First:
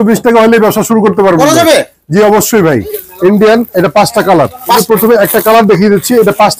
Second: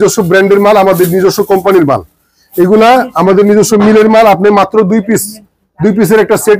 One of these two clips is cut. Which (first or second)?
first